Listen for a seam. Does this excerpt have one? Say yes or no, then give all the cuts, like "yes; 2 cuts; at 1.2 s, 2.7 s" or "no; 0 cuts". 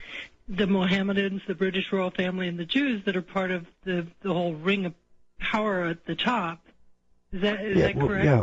no; 0 cuts